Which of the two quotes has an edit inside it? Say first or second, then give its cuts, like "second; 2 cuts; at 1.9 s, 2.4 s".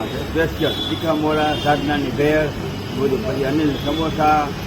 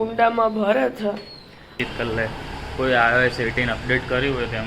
second; 1 cut; at 1.8 s